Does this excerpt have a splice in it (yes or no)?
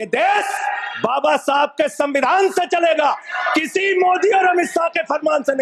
no